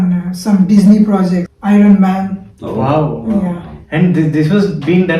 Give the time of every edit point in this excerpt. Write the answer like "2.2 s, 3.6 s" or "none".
1.5 s